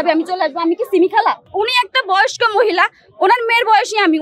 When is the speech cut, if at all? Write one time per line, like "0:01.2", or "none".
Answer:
0:01.5